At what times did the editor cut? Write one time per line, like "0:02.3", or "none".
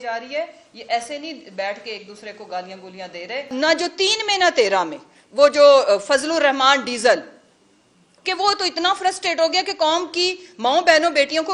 0:03.5

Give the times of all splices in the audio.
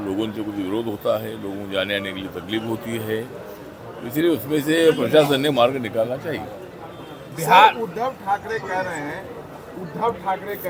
none

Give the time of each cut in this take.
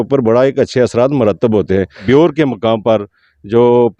0:02.0

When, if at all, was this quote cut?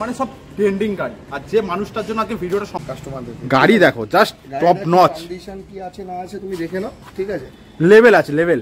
0:02.8

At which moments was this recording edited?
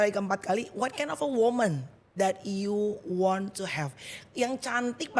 none

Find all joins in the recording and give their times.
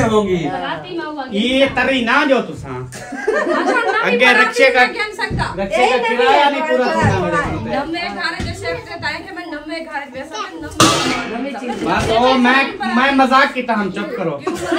none

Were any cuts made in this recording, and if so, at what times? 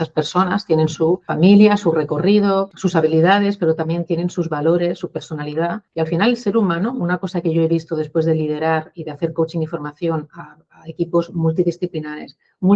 0:01.3
0:02.7
0:05.8

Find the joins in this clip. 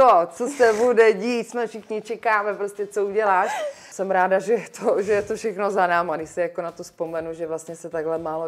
0:03.9

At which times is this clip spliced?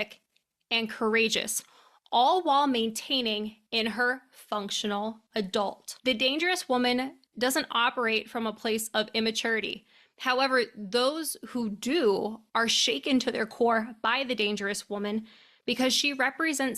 0:05.9

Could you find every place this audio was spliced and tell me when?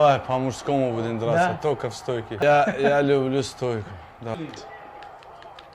none

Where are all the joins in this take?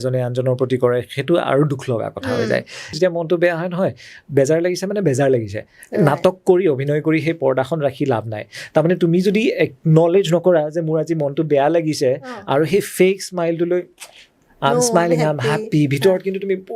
0:03.0

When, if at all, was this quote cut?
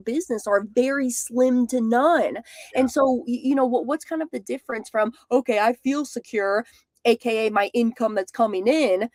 none

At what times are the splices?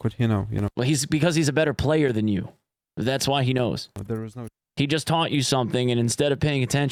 none

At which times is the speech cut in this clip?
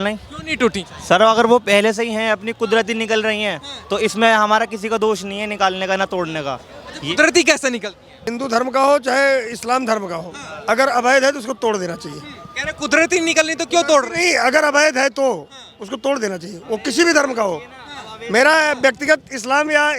0:08.3

